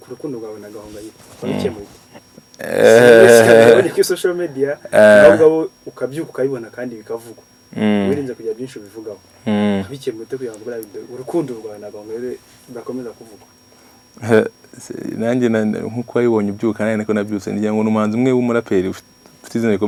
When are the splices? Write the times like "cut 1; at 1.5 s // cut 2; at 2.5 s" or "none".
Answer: none